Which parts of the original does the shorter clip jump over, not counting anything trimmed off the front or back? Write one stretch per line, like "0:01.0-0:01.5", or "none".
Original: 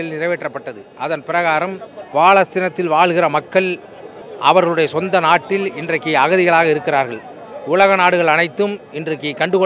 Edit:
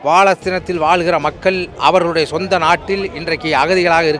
0:03.8-0:04.3